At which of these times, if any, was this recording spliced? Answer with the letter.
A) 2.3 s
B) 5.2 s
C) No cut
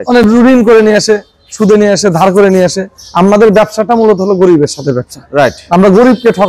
C